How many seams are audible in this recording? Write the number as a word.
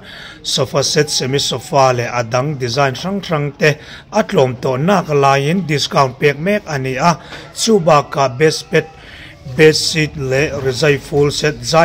zero